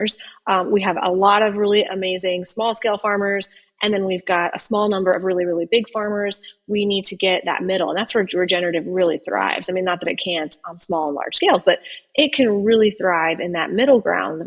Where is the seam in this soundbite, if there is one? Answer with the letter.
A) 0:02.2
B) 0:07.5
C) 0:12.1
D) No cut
D